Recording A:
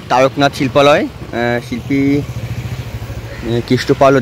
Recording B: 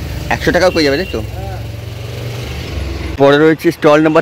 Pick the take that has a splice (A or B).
B